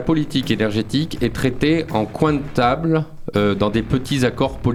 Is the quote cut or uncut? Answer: uncut